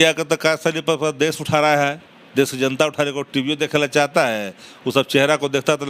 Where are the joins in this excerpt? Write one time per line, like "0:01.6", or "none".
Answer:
none